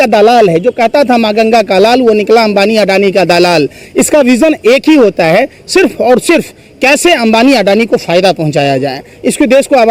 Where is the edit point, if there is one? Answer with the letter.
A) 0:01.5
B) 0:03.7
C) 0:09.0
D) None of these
D